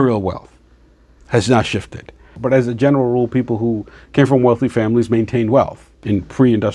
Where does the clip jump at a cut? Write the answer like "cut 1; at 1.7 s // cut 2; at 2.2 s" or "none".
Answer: cut 1; at 2.4 s